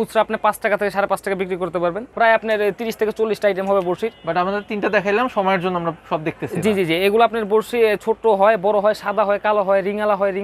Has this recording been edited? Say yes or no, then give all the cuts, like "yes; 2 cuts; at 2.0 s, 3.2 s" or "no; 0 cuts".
yes; 1 cut; at 2.0 s